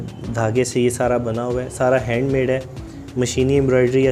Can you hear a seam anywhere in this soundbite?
no; 0 cuts

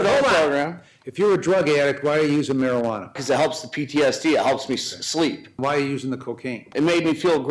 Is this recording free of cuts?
no; 3 cuts; at 3.2 s, 5.6 s, 6.6 s

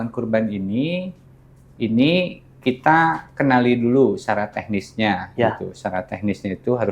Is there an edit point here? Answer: no; 0 cuts

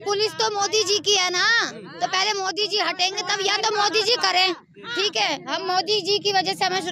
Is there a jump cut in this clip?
no; 0 cuts

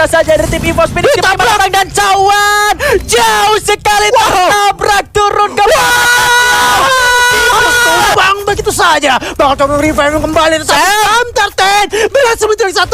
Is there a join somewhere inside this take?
yes; 1 cut; at 8.1 s

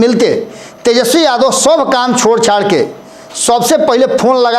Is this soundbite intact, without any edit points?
yes; 0 cuts

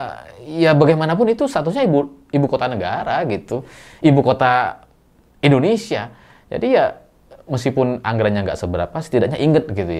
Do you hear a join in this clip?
no; 0 cuts

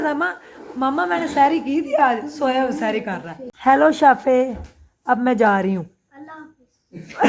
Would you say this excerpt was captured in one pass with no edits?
no; 1 cut; at 3.4 s

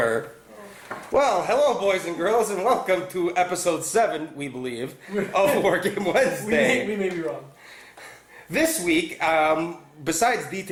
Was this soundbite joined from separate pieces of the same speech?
no; 0 cuts

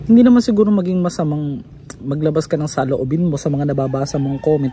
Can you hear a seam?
no; 0 cuts

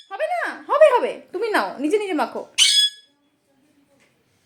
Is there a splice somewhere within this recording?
no; 0 cuts

